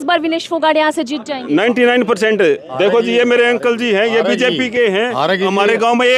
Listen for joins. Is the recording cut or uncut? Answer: uncut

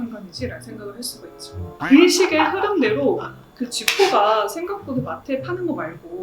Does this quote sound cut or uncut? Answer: cut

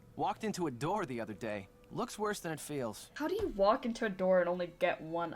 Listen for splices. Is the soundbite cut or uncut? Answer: cut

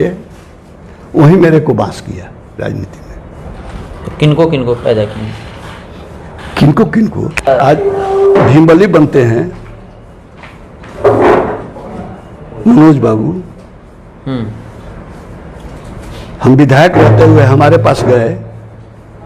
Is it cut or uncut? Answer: cut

